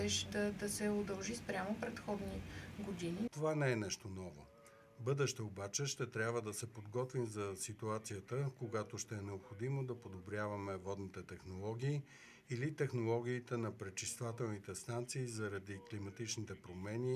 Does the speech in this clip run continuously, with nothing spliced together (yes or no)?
no